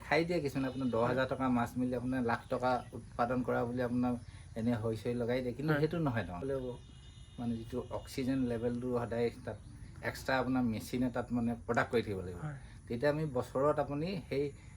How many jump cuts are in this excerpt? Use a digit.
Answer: 1